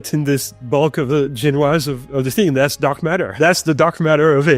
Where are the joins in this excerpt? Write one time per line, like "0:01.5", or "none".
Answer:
0:03.3